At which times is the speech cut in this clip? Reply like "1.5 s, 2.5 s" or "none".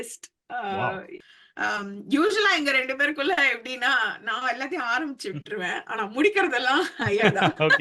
1.2 s